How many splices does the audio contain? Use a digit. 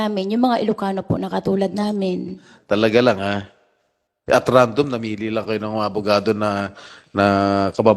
0